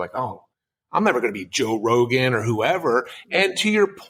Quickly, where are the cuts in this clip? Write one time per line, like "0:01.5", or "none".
none